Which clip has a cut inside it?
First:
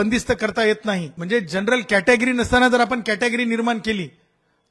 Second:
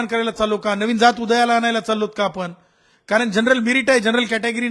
first; 1 cut; at 1.1 s

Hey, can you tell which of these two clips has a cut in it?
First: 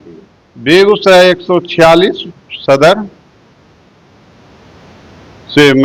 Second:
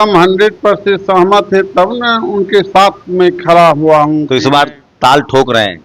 second; 1 cut; at 4.3 s

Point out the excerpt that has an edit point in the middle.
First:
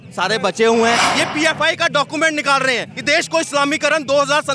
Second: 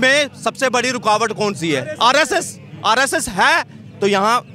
first; 1 cut; at 1.1 s

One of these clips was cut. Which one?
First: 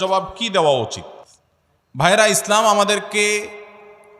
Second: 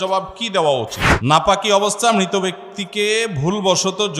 second; 1 cut; at 1.0 s

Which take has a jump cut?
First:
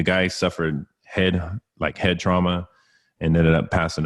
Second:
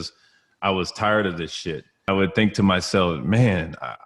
second; 1 cut; at 2.1 s

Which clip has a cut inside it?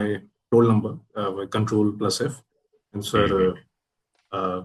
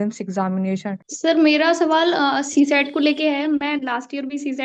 second; 1 cut; at 1.1 s

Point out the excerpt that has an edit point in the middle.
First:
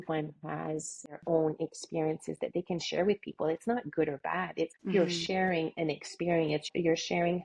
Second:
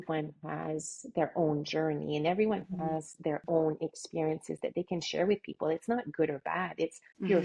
first; 3 cuts; at 1.1 s, 4.8 s, 6.7 s

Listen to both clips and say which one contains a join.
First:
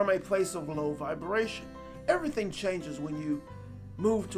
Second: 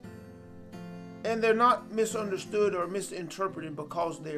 second; 1 cut; at 1.2 s

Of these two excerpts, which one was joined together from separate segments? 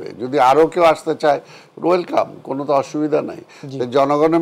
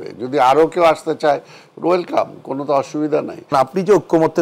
second; 1 cut; at 3.5 s

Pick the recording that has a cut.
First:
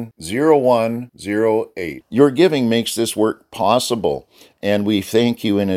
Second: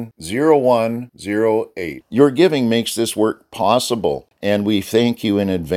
second; 1 cut; at 4.3 s

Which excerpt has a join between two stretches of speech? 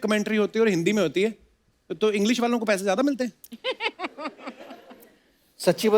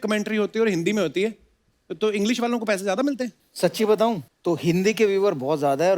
second; 2 cuts; at 3.4 s, 4.3 s

